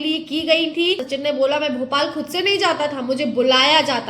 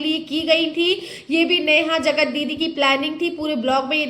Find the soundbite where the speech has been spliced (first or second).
first